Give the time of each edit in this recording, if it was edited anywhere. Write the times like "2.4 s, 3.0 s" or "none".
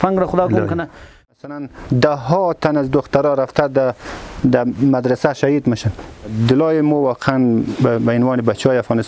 1.3 s, 6.3 s

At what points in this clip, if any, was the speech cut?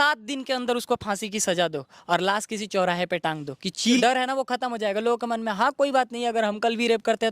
4.0 s

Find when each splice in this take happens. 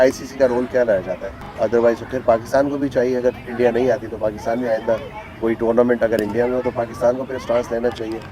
1.4 s

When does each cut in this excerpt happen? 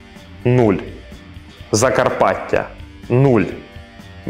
none

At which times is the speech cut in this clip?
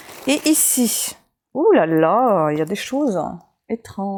none

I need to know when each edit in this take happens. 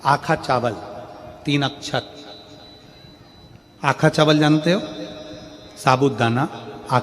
none

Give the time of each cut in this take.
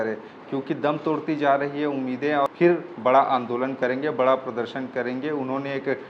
2.5 s

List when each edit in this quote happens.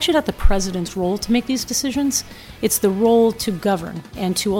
none

